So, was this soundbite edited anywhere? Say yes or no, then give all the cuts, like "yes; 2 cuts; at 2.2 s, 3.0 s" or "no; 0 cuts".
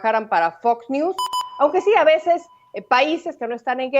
yes; 1 cut; at 1.3 s